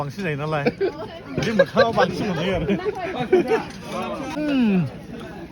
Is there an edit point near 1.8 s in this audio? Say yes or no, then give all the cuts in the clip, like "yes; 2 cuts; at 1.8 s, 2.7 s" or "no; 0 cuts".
no; 1 cut; at 4.3 s